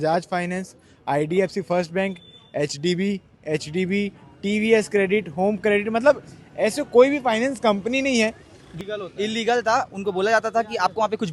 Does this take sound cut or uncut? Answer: cut